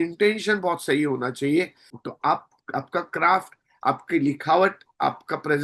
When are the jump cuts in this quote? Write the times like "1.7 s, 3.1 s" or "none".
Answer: 1.8 s